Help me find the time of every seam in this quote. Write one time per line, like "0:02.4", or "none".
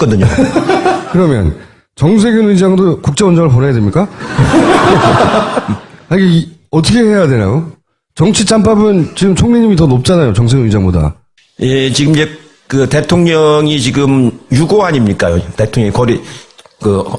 0:09.8